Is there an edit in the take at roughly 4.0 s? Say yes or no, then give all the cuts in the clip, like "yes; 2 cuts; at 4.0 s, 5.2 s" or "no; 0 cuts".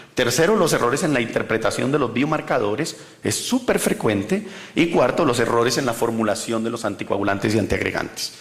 yes; 1 cut; at 4.0 s